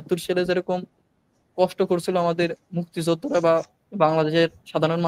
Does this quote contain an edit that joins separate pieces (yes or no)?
no